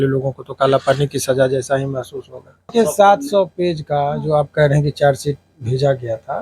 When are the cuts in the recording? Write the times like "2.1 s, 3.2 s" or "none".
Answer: 2.7 s